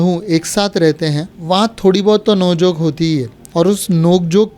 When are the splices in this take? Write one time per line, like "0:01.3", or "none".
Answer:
0:01.3
0:03.4